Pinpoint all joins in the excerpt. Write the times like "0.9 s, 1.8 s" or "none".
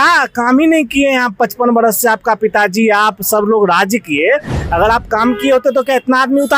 none